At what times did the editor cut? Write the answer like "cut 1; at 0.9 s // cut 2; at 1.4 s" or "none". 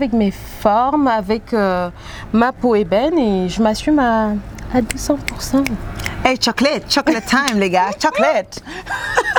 none